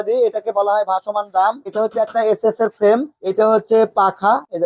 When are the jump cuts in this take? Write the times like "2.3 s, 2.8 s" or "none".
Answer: none